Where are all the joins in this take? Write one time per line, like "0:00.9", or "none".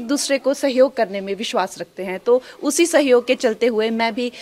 none

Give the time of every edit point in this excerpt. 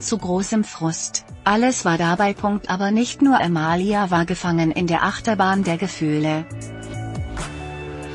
0:06.5

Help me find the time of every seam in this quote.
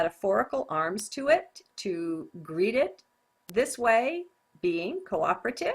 0:03.1

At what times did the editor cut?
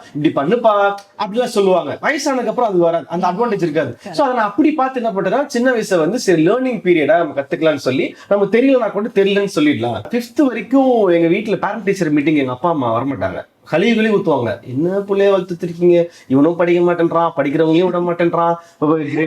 0:10.1

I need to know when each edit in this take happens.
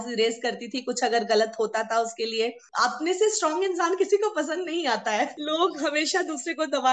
0:02.7
0:05.4

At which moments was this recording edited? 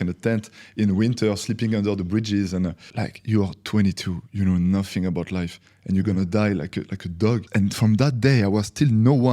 0:02.9
0:07.5

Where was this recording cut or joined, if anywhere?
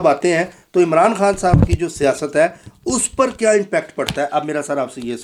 none

